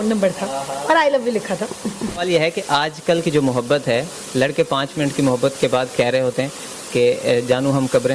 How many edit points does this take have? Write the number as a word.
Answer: one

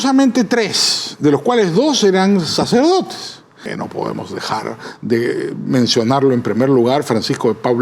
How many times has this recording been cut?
one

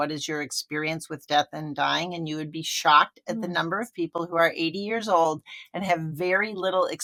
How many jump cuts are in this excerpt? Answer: zero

